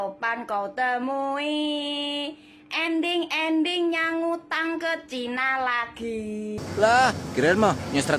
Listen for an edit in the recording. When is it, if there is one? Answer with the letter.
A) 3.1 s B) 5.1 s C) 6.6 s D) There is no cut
C